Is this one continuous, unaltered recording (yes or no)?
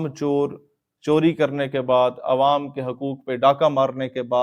yes